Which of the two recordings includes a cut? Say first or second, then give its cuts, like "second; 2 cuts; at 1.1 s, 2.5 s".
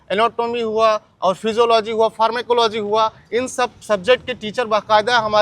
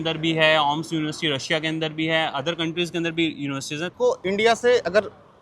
second; 1 cut; at 3.9 s